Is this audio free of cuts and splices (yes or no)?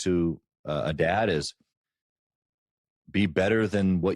yes